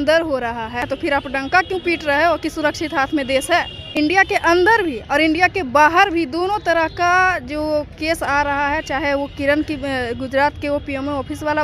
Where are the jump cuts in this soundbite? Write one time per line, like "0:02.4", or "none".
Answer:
0:00.9
0:03.9